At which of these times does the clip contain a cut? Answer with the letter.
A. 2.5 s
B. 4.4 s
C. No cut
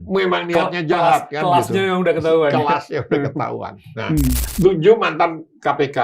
B